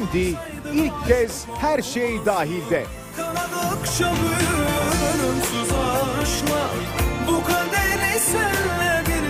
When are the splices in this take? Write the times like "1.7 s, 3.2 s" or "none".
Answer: none